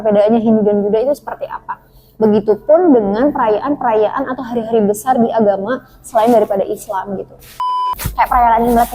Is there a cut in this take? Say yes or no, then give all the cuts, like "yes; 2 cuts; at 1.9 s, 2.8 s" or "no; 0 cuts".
yes; 1 cut; at 7.6 s